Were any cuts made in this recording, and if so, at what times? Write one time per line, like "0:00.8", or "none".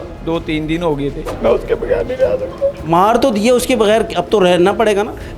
0:01.3

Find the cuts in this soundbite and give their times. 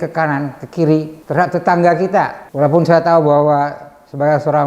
0:01.2
0:02.4

